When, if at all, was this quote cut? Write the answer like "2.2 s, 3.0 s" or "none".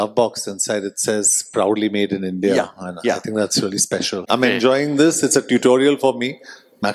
4.2 s